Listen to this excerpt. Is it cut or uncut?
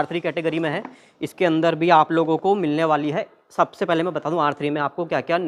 uncut